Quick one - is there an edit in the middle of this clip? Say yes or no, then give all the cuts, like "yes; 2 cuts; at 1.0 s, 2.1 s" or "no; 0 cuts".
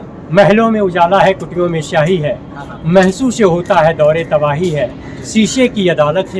no; 0 cuts